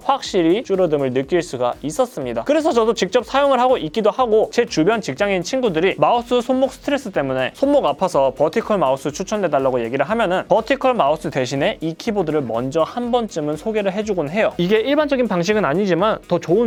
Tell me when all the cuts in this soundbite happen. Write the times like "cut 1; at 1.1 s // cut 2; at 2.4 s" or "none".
none